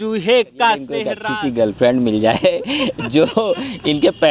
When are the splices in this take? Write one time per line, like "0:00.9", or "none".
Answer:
0:01.2